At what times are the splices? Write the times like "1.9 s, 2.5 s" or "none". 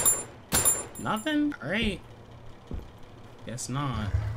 none